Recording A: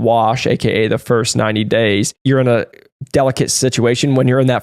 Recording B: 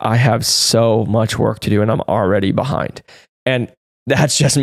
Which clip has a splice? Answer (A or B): A